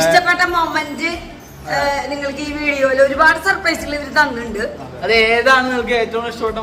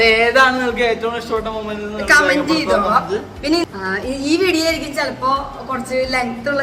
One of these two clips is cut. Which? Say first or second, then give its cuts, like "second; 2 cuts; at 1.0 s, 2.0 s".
second; 1 cut; at 3.6 s